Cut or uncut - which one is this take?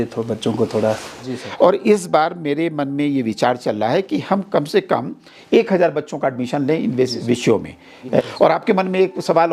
cut